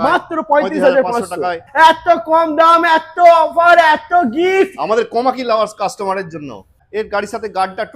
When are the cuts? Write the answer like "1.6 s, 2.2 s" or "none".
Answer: 1.6 s, 6.8 s